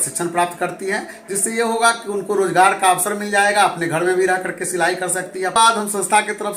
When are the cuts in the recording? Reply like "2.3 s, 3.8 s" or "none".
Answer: 5.5 s